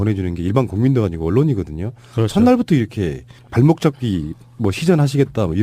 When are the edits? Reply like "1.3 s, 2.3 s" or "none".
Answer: 2.5 s